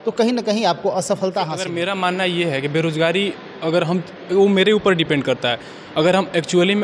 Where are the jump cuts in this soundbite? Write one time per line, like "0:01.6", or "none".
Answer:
0:01.6